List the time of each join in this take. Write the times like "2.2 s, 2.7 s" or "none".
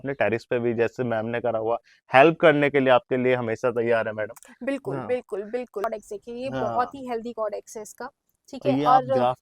5.8 s